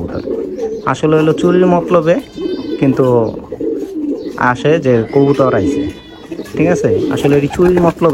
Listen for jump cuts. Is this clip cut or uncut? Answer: uncut